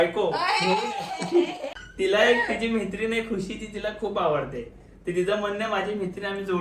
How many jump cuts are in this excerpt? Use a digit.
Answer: 1